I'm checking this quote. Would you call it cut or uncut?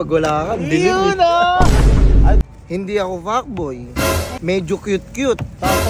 cut